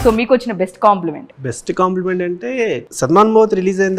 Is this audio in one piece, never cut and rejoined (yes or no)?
no